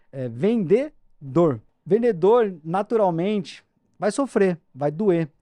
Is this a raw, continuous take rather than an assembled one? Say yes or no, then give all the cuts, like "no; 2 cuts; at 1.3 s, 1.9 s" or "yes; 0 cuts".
no; 1 cut; at 1.7 s